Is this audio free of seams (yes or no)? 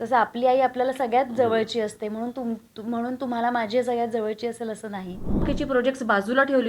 no